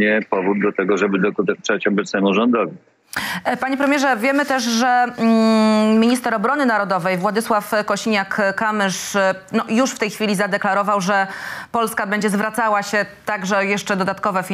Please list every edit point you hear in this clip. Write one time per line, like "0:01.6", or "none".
none